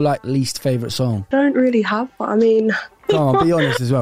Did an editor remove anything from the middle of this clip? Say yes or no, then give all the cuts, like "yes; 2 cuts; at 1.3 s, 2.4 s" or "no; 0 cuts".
yes; 2 cuts; at 1.3 s, 3.0 s